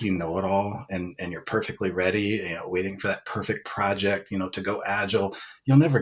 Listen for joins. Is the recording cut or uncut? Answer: uncut